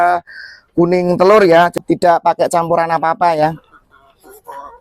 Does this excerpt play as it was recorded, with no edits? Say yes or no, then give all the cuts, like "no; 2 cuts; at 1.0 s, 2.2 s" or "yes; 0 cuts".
no; 1 cut; at 1.7 s